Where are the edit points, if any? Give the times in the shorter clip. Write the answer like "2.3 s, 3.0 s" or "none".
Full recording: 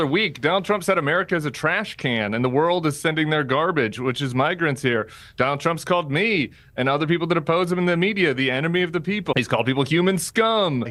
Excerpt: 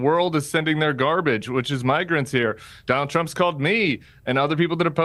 none